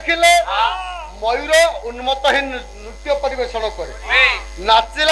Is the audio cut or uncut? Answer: uncut